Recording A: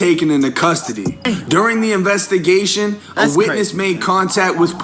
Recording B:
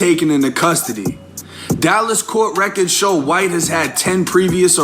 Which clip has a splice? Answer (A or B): A